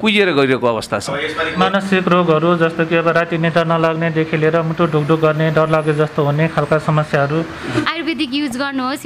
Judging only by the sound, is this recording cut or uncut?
cut